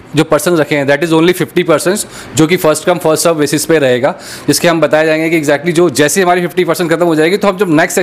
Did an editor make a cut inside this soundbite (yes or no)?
no